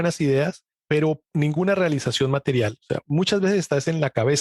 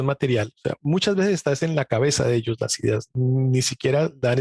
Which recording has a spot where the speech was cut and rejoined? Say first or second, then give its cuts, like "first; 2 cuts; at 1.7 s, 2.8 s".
first; 1 cut; at 1.3 s